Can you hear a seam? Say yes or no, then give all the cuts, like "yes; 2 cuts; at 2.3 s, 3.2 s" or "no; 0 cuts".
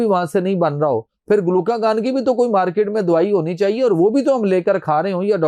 no; 0 cuts